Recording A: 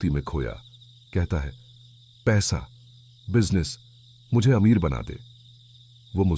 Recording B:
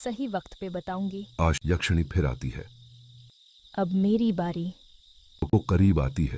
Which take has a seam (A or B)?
B